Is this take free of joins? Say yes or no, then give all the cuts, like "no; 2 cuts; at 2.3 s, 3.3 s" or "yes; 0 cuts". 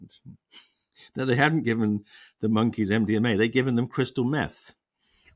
yes; 0 cuts